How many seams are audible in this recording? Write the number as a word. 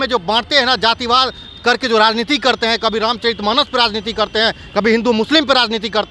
zero